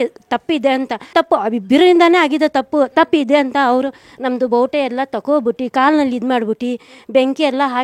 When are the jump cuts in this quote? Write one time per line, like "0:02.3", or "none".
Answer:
none